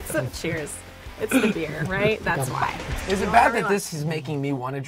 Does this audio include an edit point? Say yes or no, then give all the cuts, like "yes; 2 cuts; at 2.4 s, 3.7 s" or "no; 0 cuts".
yes; 1 cut; at 3.0 s